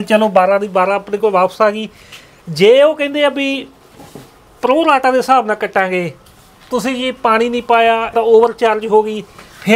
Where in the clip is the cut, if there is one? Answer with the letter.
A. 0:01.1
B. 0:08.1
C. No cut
B